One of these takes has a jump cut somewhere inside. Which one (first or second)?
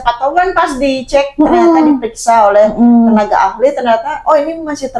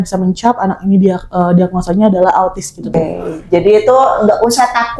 second